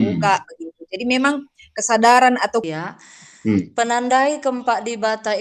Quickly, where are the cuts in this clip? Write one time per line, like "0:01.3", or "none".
0:02.6